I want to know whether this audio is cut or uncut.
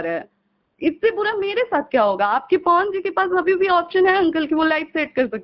uncut